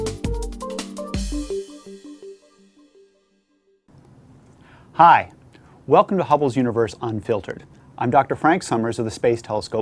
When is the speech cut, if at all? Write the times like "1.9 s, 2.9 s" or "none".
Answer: 3.7 s

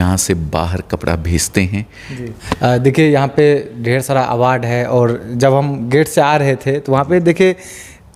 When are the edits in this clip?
2.3 s

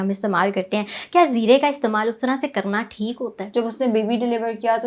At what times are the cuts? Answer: 3.4 s

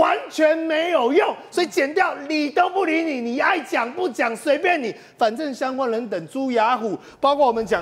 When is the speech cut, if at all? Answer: none

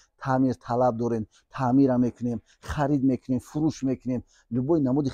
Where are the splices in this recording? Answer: none

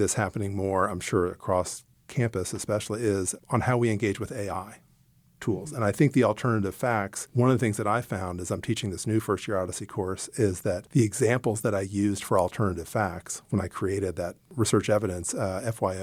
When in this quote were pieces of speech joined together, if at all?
none

